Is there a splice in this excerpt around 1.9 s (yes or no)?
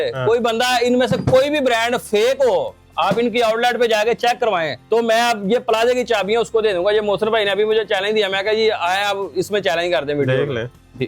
no